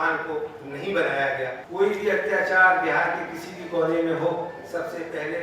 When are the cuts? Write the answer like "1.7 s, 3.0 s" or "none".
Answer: 1.6 s